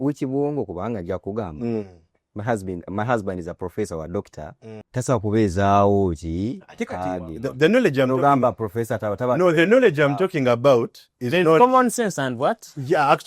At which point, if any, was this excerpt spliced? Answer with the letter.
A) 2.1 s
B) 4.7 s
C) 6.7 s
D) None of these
B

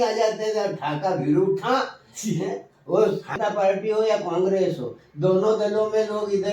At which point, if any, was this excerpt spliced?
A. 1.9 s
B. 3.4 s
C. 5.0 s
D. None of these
B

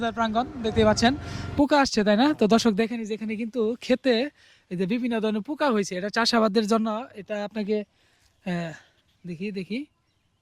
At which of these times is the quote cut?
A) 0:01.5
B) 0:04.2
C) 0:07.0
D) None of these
A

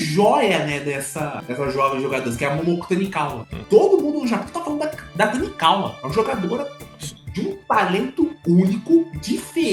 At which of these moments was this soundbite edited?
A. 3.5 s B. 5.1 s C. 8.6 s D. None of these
A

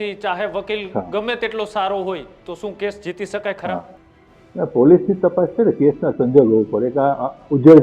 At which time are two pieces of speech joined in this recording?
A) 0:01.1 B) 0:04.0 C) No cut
C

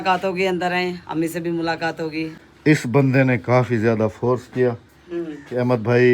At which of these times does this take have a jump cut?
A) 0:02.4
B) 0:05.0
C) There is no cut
A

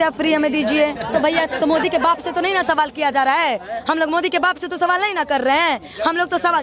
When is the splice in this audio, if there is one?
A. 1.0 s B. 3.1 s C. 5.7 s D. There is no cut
A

